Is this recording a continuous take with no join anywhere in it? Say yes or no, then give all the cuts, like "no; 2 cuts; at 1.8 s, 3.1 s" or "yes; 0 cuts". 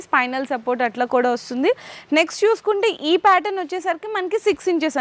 yes; 0 cuts